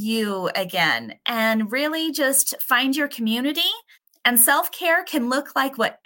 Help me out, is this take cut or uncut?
uncut